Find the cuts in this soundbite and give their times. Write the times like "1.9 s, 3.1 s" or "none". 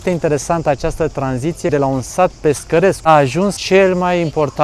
1.7 s, 3.4 s

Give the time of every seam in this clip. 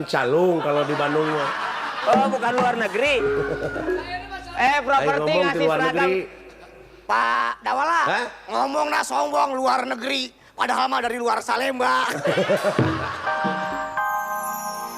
13.6 s

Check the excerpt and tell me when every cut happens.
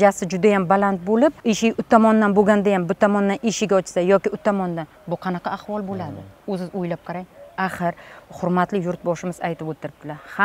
1.4 s

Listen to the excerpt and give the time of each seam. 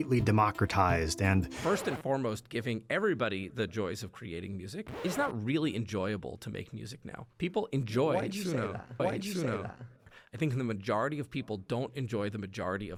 none

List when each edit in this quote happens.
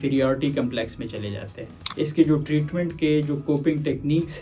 1.8 s

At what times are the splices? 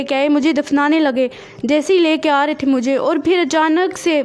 none

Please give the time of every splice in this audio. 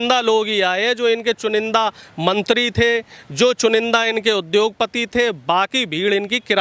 none

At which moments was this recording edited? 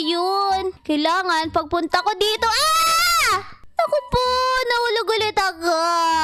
none

